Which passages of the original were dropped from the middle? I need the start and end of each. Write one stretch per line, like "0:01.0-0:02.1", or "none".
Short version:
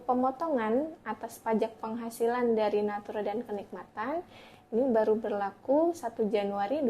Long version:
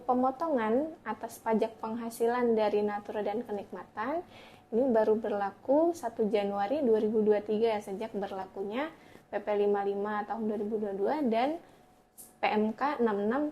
none